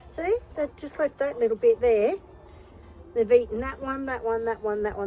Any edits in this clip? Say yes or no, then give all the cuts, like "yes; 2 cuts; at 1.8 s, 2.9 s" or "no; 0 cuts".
no; 0 cuts